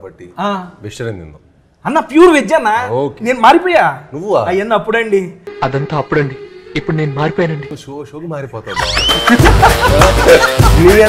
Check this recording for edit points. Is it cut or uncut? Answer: uncut